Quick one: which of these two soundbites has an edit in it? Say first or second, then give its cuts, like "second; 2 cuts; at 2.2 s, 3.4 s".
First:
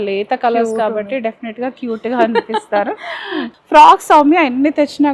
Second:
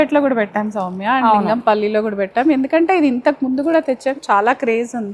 first; 1 cut; at 3.5 s